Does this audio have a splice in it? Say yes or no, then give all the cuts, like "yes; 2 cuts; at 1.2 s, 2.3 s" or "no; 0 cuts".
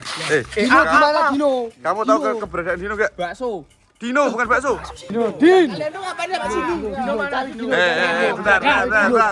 yes; 1 cut; at 5.1 s